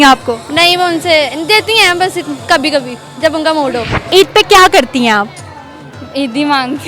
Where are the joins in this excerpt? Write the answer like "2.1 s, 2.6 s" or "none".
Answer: 4.0 s